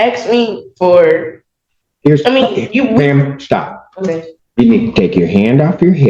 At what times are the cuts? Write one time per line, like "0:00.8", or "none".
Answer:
0:04.4